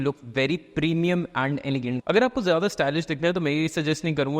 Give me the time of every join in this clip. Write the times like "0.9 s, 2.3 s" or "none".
2.0 s